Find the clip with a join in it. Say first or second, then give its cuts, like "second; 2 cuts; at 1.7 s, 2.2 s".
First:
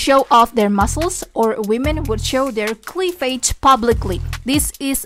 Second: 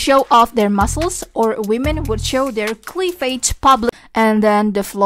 second; 1 cut; at 3.9 s